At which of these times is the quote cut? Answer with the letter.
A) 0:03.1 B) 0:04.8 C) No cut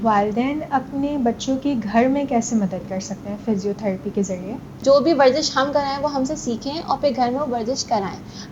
B